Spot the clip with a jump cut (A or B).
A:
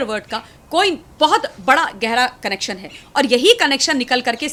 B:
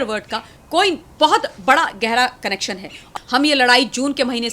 B